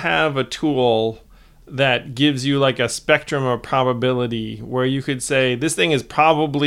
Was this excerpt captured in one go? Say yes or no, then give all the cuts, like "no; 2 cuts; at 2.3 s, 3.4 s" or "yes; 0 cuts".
yes; 0 cuts